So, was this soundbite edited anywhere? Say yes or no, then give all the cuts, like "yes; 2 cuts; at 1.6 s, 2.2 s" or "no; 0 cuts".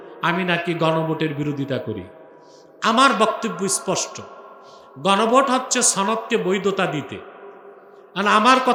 no; 0 cuts